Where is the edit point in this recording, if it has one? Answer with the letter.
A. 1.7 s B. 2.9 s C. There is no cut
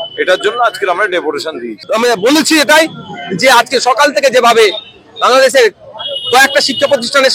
A